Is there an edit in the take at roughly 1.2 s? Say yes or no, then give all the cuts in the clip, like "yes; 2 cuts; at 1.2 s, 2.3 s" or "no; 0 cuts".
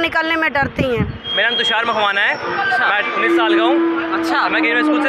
yes; 1 cut; at 1.2 s